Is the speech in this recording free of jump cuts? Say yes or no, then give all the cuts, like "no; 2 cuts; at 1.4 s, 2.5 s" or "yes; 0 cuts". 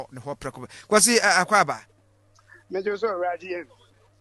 yes; 0 cuts